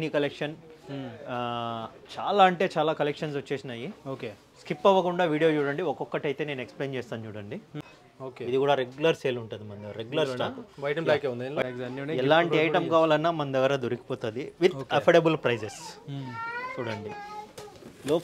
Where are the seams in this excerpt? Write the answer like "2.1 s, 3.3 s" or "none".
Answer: 7.8 s, 11.7 s